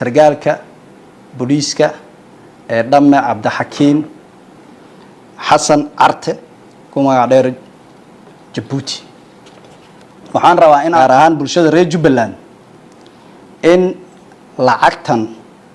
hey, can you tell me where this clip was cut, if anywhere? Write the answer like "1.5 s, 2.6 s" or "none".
11.0 s